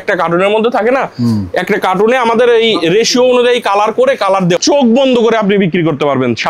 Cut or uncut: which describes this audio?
cut